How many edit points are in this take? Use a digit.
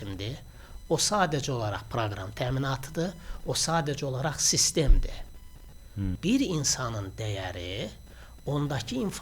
1